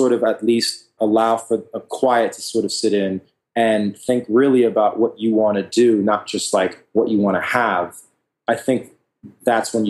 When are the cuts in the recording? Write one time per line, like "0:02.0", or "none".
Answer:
0:01.0